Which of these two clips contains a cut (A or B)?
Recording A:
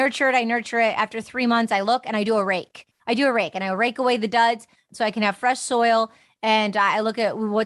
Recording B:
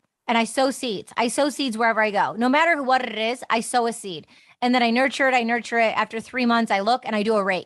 A